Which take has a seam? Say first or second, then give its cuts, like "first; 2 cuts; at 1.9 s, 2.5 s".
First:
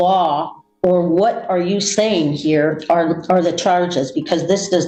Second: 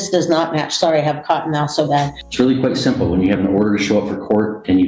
second; 1 cut; at 2.2 s